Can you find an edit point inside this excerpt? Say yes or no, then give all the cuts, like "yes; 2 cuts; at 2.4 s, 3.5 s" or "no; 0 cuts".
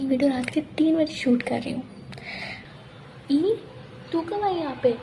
yes; 1 cut; at 2.6 s